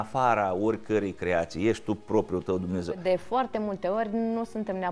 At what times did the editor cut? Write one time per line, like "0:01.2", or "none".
0:03.0